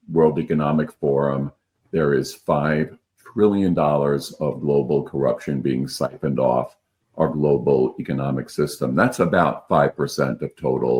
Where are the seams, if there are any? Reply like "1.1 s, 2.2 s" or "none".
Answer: none